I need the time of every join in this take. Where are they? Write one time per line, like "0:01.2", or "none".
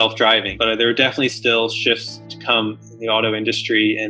none

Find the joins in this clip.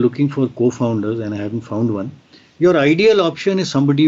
none

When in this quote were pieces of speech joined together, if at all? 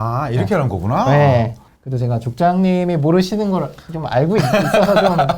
0:01.6

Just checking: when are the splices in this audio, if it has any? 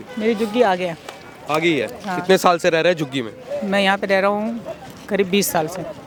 none

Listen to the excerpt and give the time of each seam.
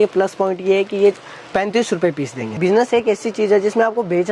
0:02.5

